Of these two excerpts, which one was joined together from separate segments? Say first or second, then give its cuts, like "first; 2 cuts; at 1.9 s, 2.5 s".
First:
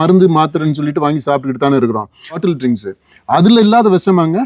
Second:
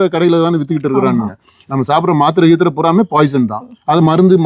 first; 1 cut; at 2.4 s